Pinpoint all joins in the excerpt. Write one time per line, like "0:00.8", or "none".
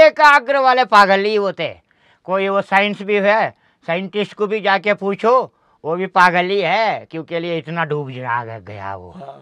none